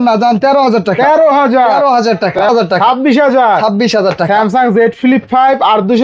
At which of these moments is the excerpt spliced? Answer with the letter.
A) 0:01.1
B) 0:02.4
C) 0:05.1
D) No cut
B